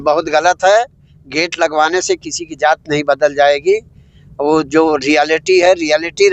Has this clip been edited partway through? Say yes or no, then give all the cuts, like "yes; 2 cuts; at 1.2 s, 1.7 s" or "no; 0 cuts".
no; 0 cuts